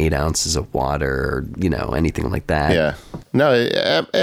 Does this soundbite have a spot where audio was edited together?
no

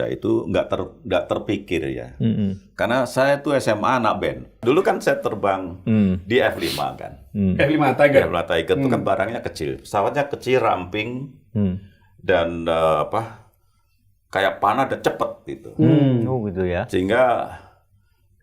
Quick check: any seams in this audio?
yes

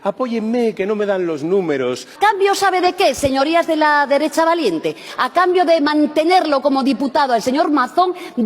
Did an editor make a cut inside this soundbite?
yes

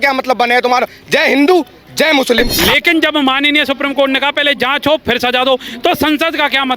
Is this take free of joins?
no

